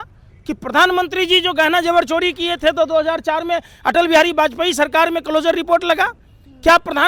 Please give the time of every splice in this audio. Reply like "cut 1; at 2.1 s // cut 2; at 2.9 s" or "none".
none